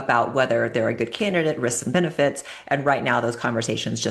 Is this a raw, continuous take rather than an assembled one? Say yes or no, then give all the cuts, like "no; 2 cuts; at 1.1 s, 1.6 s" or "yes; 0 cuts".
yes; 0 cuts